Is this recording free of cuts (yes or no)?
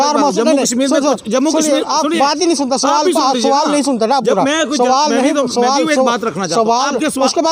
yes